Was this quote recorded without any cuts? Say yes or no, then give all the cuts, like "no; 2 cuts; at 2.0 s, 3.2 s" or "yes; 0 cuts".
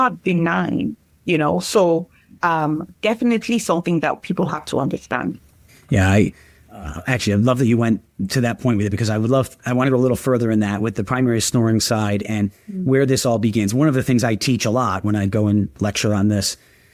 yes; 0 cuts